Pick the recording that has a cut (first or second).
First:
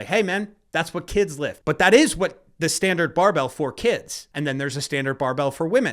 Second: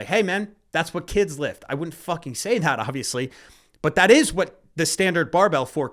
first